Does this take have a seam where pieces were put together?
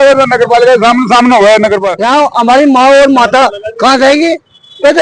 yes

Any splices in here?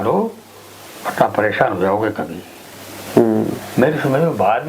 no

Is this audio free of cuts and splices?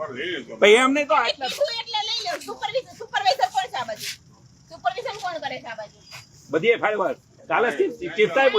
yes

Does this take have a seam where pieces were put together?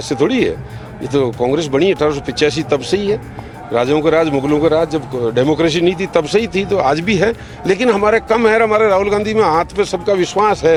no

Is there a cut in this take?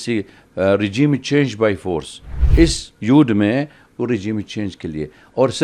yes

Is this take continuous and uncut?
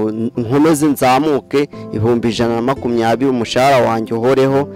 yes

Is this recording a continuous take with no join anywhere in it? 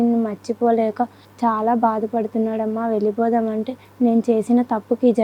no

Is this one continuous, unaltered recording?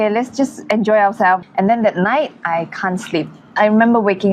no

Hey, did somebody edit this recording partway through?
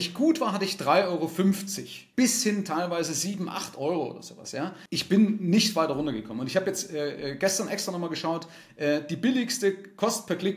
yes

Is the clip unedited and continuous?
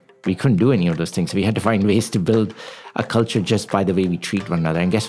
yes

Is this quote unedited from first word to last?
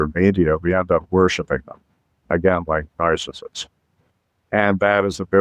yes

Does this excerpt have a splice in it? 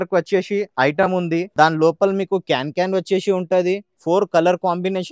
yes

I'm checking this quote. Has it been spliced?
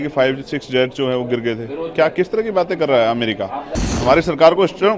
yes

